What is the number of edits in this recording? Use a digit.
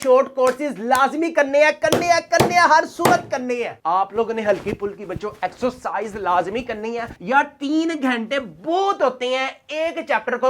2